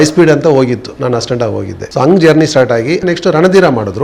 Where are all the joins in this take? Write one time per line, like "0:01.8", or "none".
0:01.8
0:03.0